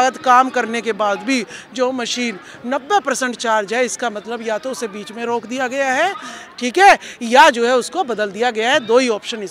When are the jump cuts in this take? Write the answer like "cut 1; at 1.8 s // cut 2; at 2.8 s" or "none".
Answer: none